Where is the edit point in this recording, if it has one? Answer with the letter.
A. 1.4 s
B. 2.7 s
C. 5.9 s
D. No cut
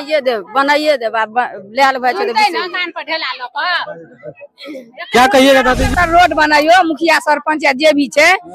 C